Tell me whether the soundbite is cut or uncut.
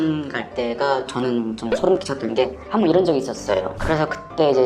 cut